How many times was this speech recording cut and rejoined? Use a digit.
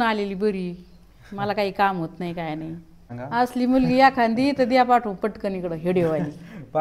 1